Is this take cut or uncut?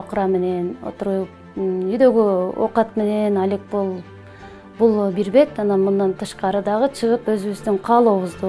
uncut